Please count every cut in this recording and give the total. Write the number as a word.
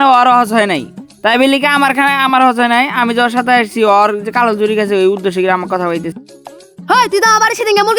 zero